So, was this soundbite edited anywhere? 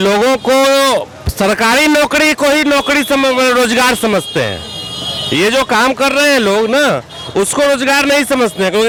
no; 0 cuts

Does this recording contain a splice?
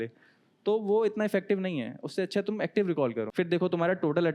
yes; 1 cut; at 3.3 s

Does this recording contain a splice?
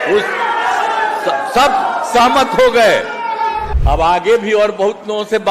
yes; 1 cut; at 3.7 s

